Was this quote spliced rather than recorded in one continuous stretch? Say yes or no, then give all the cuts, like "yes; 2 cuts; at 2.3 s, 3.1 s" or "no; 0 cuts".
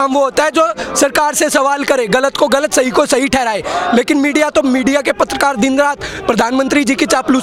no; 0 cuts